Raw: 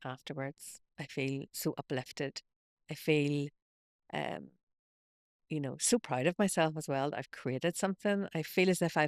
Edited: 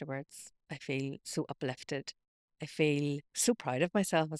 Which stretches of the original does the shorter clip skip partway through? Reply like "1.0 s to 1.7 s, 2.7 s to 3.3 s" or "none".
3.6 s to 5.8 s